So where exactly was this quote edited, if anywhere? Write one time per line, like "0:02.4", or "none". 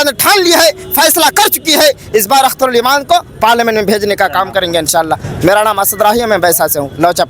none